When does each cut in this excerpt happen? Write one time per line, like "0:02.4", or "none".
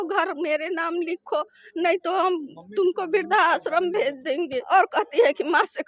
0:04.6